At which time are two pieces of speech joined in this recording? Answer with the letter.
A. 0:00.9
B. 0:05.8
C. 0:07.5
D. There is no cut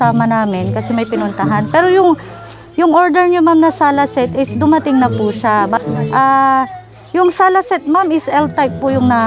B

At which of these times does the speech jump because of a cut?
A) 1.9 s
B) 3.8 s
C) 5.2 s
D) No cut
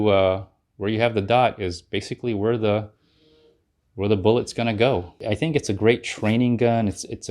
C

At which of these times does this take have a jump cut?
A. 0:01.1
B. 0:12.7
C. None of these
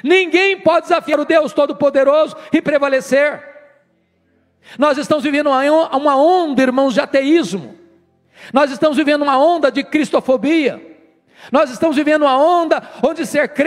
A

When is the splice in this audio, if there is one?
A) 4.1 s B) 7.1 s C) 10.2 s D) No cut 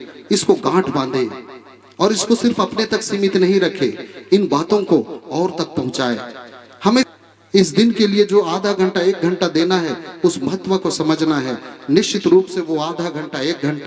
B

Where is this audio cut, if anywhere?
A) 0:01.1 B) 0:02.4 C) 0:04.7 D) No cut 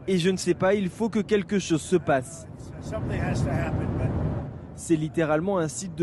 D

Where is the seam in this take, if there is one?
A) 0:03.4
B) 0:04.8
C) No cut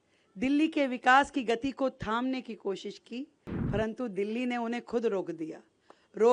A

